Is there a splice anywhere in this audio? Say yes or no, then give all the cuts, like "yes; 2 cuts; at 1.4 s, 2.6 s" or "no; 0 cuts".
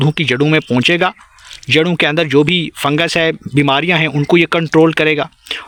no; 0 cuts